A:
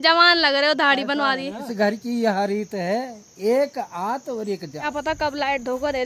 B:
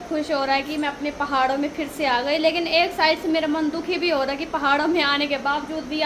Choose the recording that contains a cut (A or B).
A